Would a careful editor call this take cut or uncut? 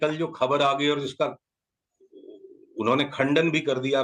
uncut